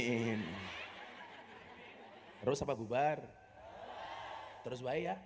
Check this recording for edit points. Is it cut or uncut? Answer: cut